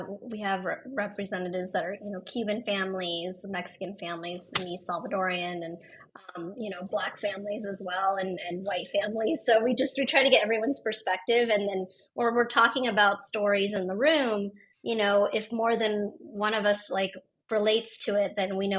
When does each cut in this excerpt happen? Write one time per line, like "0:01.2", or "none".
none